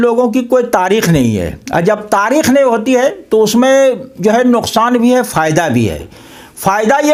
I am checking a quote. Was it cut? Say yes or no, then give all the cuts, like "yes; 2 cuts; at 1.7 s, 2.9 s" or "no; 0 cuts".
no; 0 cuts